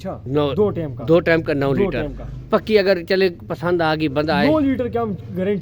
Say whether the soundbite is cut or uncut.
uncut